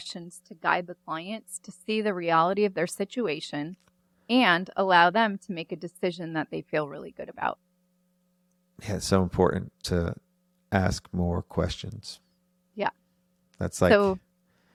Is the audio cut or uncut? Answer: uncut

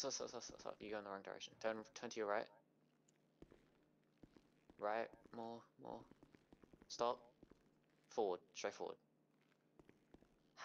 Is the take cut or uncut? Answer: uncut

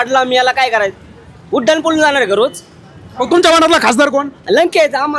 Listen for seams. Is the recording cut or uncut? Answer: uncut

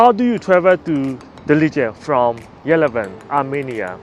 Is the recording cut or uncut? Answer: uncut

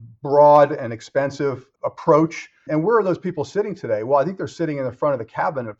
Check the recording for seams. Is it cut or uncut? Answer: cut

